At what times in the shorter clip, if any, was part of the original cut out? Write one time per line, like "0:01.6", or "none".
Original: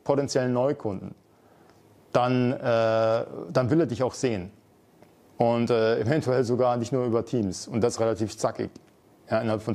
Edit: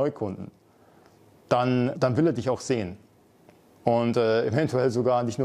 0:01.9